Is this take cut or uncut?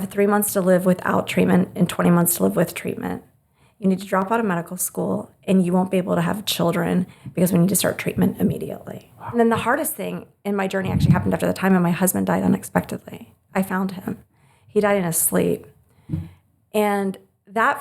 cut